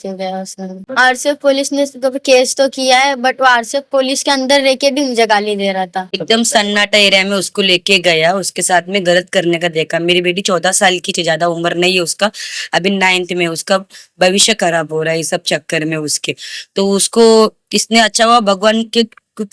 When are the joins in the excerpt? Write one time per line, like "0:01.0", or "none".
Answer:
0:00.8
0:06.1